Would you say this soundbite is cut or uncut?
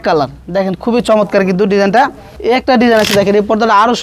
cut